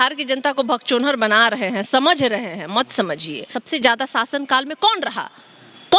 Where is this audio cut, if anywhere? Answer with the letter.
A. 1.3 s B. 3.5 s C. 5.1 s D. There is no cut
B